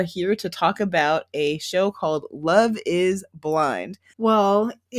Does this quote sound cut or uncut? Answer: cut